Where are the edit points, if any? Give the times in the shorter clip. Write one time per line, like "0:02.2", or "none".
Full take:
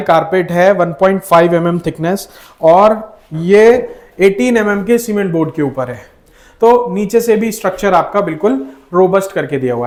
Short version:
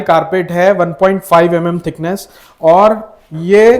none